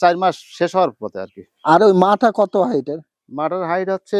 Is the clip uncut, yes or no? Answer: yes